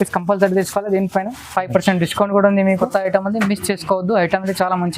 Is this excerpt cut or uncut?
cut